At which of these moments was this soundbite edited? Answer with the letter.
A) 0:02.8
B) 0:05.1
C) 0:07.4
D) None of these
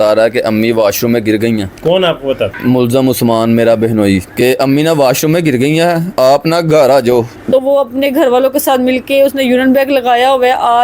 C